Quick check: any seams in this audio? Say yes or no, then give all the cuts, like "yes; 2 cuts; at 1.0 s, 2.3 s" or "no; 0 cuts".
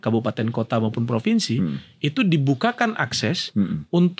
no; 0 cuts